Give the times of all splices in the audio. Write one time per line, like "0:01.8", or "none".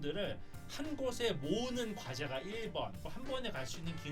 0:03.0